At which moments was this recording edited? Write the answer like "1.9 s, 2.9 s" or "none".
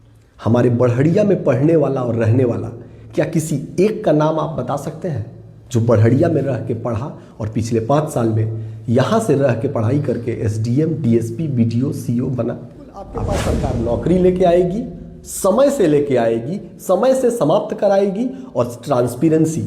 13.4 s